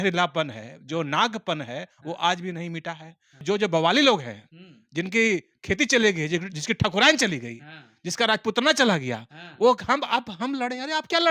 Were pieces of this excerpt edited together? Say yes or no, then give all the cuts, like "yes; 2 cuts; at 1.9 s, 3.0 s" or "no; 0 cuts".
yes; 1 cut; at 3.4 s